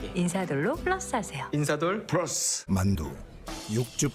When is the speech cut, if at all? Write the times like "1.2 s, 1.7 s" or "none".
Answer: 2.5 s